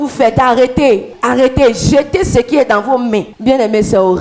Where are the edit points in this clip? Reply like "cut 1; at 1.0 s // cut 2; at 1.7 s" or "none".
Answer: cut 1; at 3.3 s